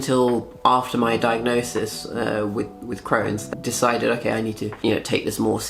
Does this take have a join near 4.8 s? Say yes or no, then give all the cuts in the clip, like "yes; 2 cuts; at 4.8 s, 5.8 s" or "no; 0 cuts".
yes; 2 cuts; at 3.4 s, 4.8 s